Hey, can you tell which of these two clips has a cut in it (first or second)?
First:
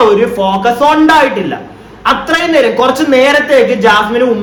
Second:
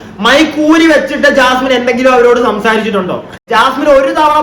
second